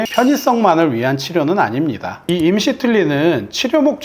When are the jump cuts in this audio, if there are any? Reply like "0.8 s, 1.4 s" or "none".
2.1 s